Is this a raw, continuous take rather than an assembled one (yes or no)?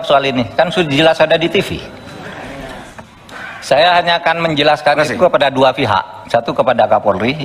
no